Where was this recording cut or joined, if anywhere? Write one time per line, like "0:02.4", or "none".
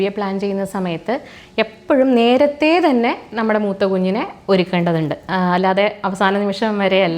none